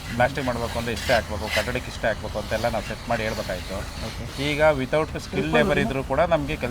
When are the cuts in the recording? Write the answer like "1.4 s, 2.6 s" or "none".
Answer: none

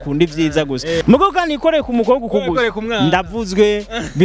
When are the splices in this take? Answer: 1.0 s

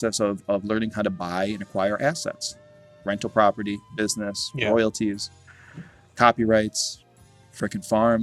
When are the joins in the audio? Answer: none

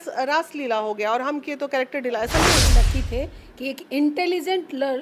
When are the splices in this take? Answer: 2.7 s

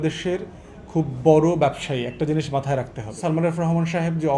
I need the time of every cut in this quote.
3.1 s

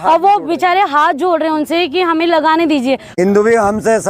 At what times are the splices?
3.1 s

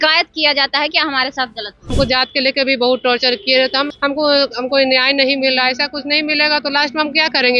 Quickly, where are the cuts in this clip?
1.9 s, 3.9 s

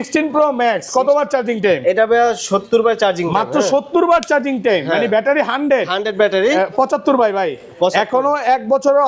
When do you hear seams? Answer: none

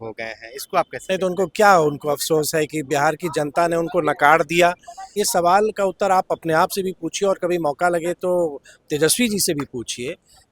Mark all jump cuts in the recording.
5.1 s

